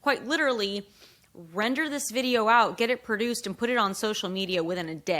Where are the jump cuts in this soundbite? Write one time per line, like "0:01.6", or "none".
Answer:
none

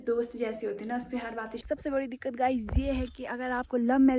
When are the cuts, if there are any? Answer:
0:01.6

